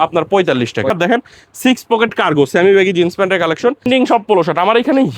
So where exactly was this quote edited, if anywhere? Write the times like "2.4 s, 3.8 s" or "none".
0.9 s, 3.9 s